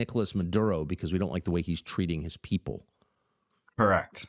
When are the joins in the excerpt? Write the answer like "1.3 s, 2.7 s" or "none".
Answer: none